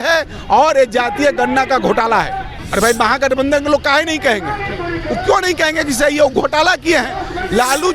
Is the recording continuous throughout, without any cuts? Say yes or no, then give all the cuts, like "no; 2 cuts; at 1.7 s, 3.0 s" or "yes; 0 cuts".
no; 1 cut; at 2.5 s